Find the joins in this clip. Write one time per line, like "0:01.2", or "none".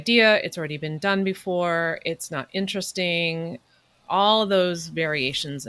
none